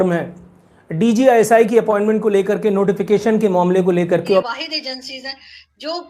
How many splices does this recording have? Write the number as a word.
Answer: one